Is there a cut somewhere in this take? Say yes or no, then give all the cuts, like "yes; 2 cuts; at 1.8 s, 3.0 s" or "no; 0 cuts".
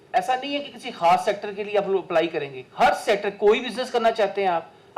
no; 0 cuts